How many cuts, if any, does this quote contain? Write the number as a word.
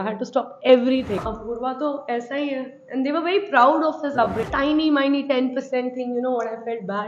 two